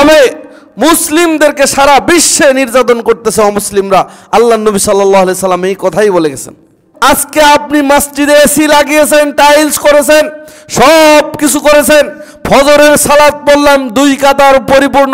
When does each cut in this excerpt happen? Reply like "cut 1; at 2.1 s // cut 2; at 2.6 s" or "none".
cut 1; at 6.8 s